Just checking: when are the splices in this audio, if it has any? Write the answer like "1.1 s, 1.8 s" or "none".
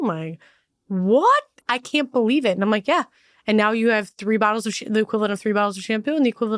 1.6 s